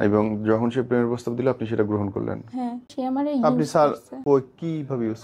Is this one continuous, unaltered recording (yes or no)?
no